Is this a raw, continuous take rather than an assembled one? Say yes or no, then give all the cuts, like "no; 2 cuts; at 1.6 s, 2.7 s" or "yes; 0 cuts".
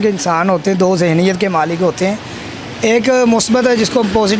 yes; 0 cuts